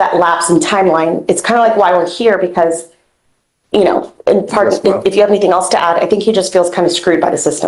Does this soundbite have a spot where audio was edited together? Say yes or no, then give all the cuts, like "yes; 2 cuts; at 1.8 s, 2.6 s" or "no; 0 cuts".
no; 0 cuts